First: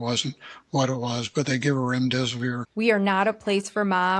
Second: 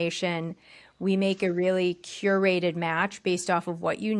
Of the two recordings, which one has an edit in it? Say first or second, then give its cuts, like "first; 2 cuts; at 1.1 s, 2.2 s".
first; 1 cut; at 2.6 s